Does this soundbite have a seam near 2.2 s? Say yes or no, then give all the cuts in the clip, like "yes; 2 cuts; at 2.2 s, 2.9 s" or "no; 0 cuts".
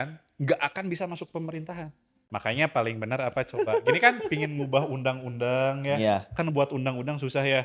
yes; 1 cut; at 2.2 s